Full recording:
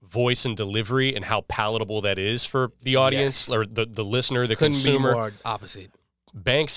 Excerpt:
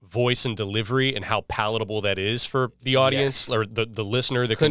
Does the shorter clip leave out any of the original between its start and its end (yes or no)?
no